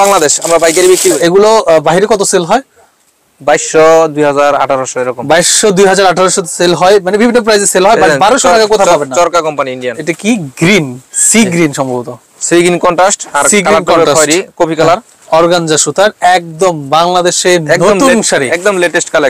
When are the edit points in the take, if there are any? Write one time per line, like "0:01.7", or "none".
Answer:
0:01.2
0:09.9
0:15.1